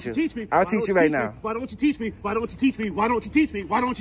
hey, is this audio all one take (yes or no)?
yes